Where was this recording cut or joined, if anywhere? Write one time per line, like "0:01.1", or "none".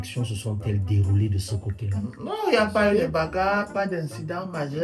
none